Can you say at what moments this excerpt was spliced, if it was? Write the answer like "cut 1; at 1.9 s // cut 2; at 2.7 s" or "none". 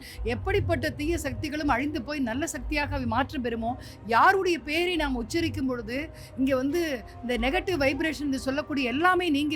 none